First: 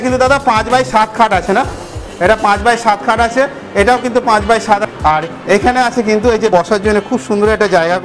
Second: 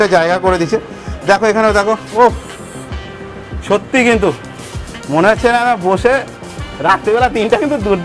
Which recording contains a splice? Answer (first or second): first